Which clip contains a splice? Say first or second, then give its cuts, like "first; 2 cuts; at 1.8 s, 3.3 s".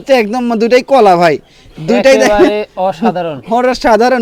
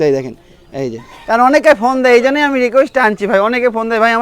second; 1 cut; at 1.1 s